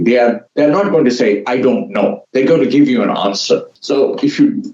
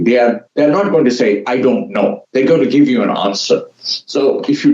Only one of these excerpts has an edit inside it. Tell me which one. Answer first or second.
first